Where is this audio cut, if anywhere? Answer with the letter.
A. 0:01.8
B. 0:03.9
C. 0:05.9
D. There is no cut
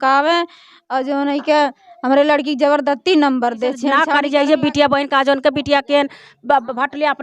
B